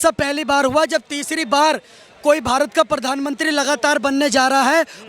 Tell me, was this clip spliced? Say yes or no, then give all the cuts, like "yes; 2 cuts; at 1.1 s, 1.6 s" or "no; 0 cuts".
no; 0 cuts